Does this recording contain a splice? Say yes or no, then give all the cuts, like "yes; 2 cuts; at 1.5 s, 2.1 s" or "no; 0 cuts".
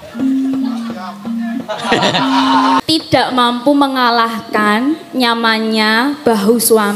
yes; 1 cut; at 2.8 s